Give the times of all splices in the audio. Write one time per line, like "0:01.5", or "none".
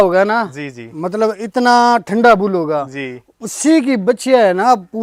none

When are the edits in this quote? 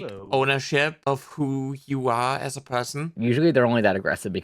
none

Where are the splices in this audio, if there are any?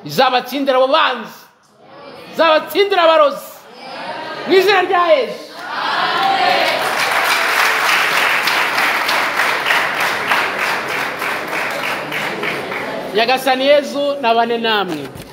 none

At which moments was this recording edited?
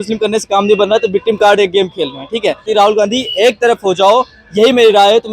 0:02.7

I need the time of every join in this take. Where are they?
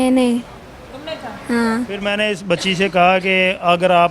0:02.0

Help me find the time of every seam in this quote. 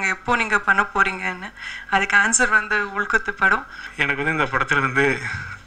0:03.8

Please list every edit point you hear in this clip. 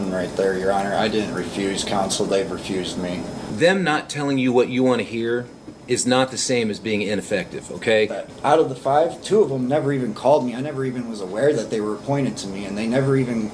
0:03.4
0:08.3

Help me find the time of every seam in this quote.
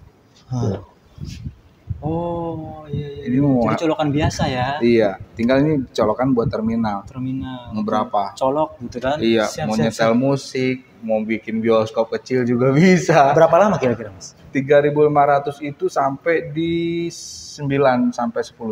none

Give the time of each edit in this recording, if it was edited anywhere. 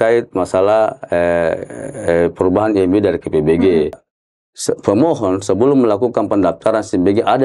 0:04.0

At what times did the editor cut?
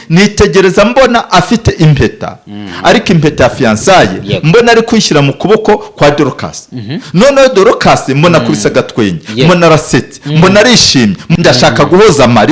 0:11.3

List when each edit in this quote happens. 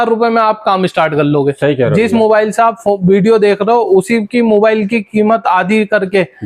none

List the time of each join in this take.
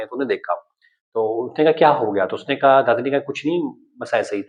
none

